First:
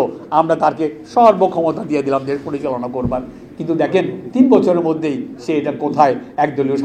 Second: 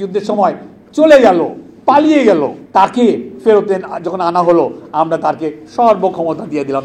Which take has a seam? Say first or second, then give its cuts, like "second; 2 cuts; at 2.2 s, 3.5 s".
second; 2 cuts; at 1.6 s, 2.6 s